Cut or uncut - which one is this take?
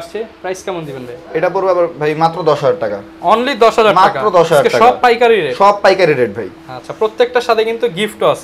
uncut